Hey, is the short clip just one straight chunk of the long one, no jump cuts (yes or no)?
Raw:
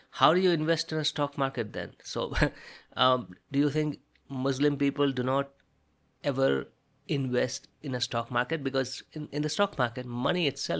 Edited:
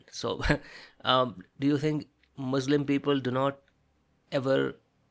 yes